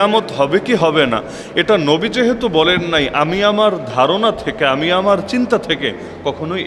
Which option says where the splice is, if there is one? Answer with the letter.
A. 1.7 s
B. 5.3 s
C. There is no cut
C